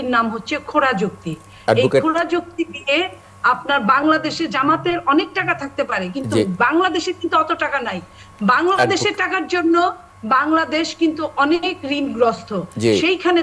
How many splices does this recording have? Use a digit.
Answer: 0